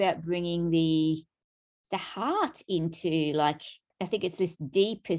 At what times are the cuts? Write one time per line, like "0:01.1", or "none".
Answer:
0:03.9

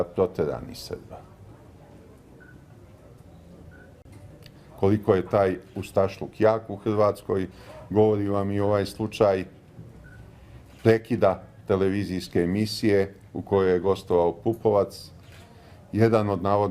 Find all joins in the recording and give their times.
0:11.6

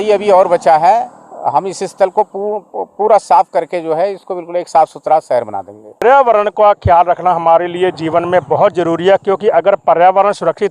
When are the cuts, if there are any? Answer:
0:06.0

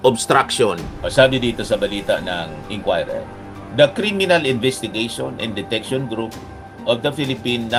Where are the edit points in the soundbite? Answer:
none

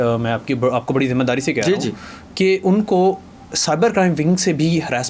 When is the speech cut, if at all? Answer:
none

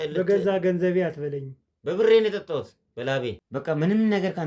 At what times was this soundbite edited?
0:03.4

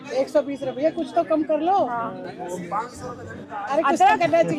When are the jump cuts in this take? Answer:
none

